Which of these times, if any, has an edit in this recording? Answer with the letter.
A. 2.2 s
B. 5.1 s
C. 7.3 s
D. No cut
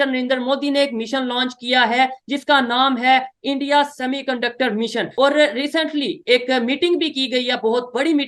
B